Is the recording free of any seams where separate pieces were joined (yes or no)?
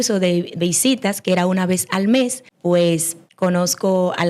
no